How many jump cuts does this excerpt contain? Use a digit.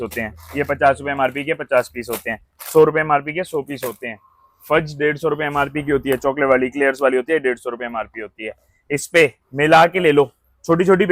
0